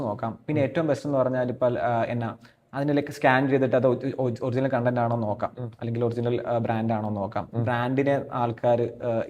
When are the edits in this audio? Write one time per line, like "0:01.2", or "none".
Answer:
none